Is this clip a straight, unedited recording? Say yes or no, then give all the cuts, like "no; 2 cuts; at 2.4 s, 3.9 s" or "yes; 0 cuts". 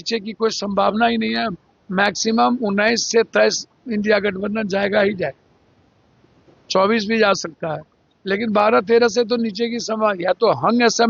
yes; 0 cuts